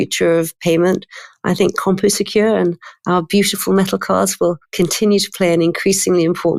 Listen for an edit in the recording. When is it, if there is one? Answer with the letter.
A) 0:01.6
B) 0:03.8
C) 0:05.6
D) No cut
D